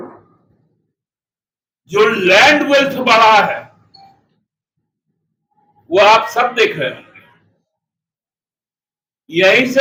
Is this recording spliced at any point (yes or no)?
no